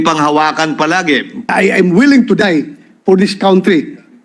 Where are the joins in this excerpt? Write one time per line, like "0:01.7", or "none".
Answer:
0:01.5